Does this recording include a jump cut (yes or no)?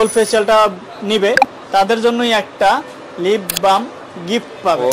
no